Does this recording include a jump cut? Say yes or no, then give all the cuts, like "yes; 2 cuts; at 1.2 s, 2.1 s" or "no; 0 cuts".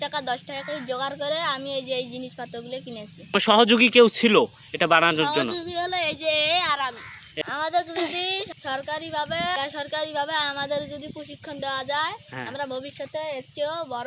yes; 2 cuts; at 3.4 s, 7.4 s